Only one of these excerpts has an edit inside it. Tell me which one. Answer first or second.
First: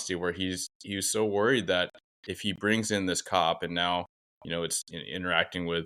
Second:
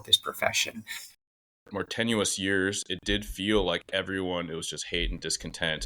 second